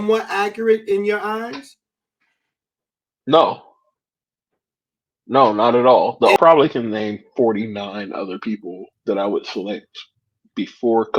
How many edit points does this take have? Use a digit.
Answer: 1